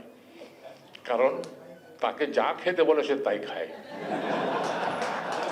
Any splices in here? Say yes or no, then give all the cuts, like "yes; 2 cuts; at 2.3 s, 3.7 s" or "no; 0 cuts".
no; 0 cuts